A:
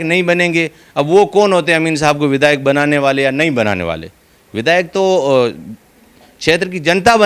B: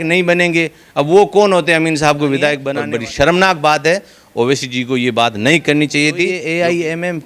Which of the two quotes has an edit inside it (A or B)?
B